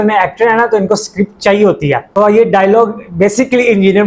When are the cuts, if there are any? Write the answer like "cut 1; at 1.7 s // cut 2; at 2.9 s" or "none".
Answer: cut 1; at 2.1 s